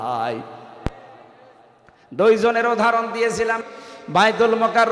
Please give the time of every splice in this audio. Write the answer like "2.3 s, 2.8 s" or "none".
3.6 s